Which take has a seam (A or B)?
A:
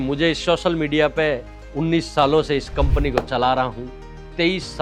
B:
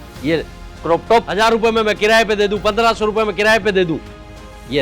B